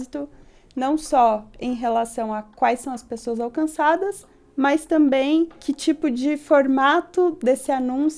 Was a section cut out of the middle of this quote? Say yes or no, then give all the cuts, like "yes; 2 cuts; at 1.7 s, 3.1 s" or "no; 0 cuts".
yes; 1 cut; at 5.6 s